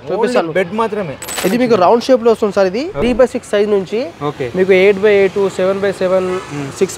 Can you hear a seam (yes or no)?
yes